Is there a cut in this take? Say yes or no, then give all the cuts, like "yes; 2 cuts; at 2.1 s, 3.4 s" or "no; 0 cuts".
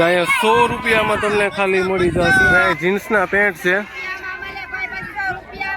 yes; 1 cut; at 2.6 s